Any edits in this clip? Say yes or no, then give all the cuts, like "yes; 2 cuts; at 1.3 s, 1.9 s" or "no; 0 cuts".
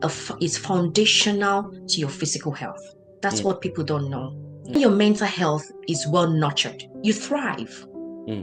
yes; 1 cut; at 4.7 s